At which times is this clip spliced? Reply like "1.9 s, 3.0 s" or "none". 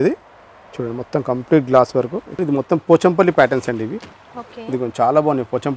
2.4 s